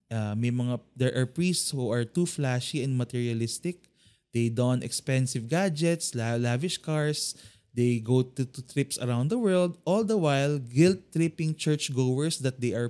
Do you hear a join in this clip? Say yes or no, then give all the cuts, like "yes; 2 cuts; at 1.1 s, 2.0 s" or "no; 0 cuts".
no; 0 cuts